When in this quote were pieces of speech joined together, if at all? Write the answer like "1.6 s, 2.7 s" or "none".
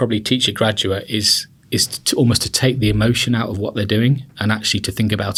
none